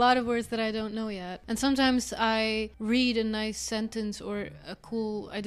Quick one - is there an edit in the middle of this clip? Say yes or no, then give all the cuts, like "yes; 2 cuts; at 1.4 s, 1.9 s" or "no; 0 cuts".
yes; 2 cuts; at 1.4 s, 2.7 s